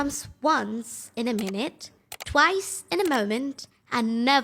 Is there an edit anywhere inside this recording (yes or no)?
no